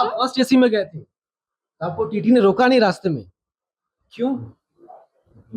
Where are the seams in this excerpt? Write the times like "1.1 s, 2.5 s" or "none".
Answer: none